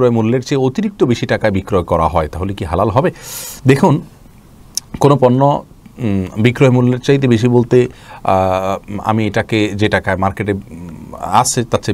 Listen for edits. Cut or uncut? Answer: uncut